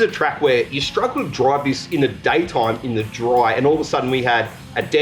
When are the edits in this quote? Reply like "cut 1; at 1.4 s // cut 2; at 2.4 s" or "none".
none